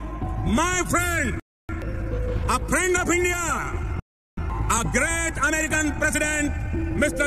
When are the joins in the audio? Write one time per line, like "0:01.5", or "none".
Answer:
none